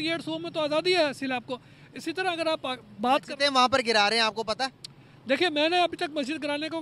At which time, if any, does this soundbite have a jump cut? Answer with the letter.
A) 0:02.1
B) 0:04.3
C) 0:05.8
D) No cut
D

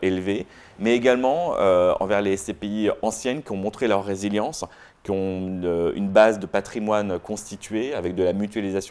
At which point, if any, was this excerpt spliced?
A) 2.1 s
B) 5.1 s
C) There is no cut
C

